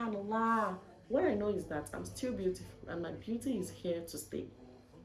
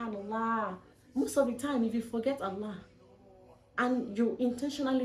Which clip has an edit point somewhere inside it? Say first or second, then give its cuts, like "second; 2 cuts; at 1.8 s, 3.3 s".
first; 1 cut; at 0.9 s